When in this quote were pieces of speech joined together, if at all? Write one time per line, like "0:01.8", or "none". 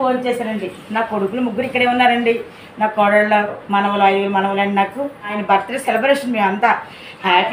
0:05.4